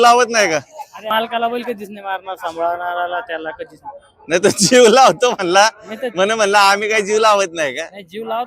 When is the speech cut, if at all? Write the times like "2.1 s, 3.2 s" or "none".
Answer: 1.1 s

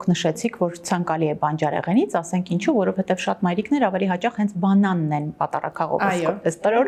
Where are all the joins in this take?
none

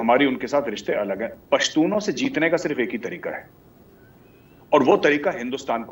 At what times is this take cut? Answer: 1.4 s

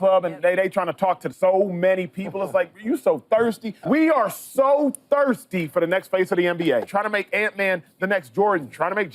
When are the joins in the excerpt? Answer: 1.3 s, 3.7 s, 6.9 s

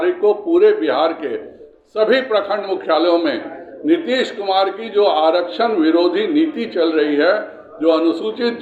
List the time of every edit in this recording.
none

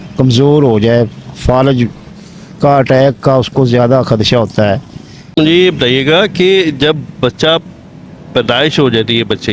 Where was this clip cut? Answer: 5.3 s

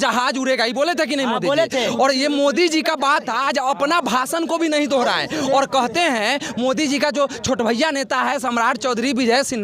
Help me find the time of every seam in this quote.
none

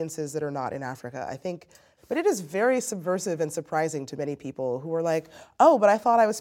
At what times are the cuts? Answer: 1.9 s

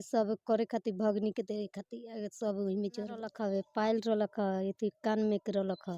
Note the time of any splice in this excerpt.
3.2 s

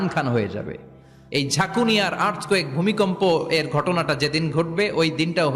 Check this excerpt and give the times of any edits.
none

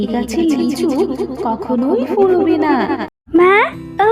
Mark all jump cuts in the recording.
3.1 s

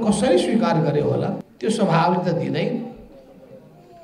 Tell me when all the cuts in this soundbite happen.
1.5 s

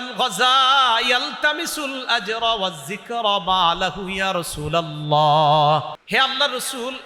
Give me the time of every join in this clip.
5.9 s

